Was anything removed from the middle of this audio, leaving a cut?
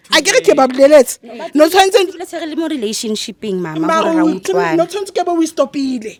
no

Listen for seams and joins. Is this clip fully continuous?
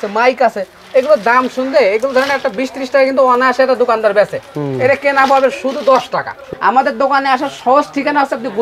no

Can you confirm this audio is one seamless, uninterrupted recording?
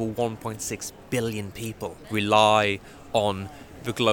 no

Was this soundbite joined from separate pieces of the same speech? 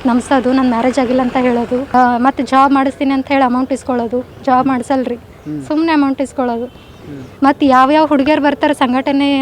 yes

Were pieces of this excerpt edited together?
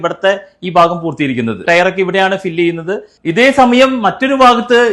no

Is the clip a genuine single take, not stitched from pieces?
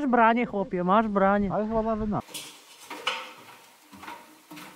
no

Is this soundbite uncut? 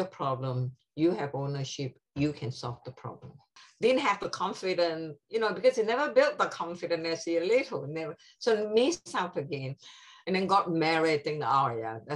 no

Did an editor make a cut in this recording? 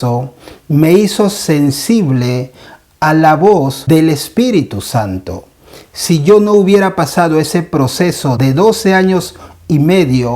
yes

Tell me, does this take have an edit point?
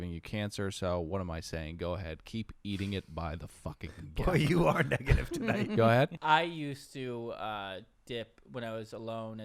yes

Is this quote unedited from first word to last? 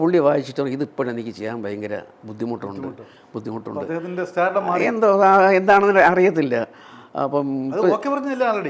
yes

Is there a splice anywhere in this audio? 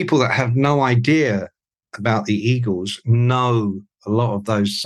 no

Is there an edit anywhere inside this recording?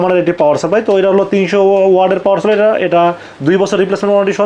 no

